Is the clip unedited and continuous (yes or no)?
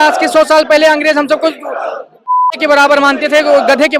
yes